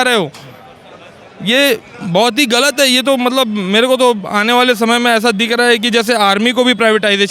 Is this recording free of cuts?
yes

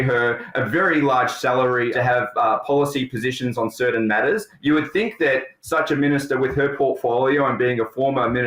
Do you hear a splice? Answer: yes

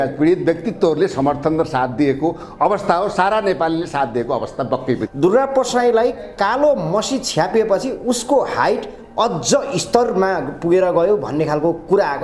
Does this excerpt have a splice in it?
yes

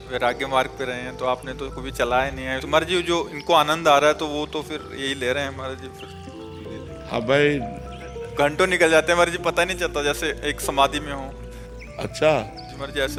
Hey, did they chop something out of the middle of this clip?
no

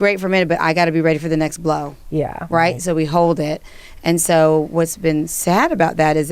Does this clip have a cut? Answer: no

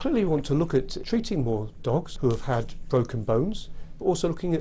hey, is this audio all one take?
no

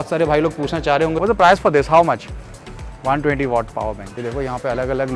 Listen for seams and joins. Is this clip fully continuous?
no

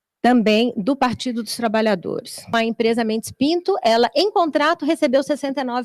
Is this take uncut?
no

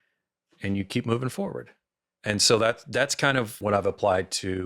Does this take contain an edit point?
yes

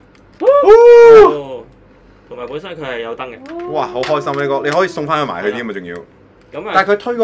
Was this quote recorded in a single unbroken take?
yes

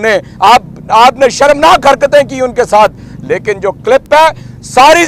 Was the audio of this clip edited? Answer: no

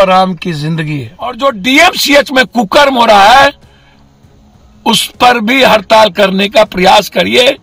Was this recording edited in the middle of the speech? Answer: yes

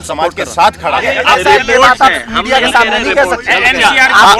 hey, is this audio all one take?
no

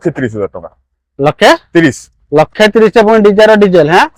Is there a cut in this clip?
no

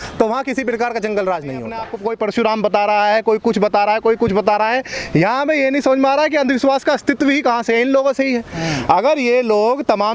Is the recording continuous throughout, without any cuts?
no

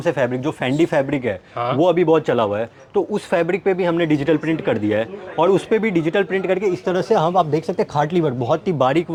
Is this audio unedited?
yes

